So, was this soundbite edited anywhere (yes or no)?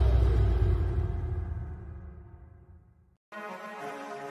yes